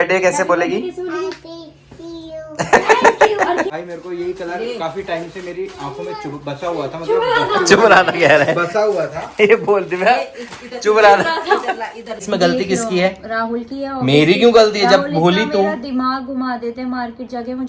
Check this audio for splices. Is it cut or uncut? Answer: cut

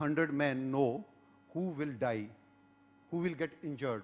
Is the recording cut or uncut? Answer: uncut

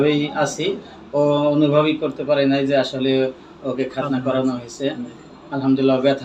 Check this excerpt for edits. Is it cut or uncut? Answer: uncut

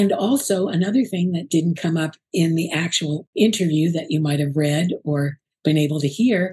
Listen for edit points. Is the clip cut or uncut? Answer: cut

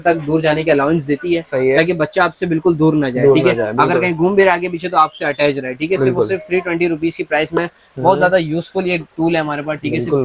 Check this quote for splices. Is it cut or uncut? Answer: uncut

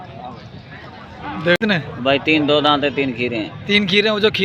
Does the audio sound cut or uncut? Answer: cut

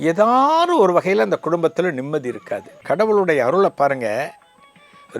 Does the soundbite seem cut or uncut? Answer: cut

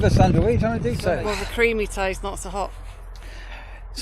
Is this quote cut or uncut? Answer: cut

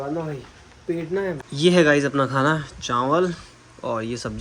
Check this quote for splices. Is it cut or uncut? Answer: cut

